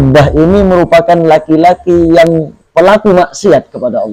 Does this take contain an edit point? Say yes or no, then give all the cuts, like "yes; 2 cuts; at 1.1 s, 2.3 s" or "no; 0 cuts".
no; 0 cuts